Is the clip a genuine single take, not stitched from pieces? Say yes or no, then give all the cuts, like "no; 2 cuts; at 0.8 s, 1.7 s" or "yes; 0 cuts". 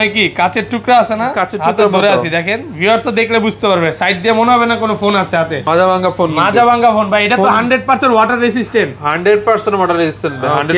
no; 1 cut; at 5.6 s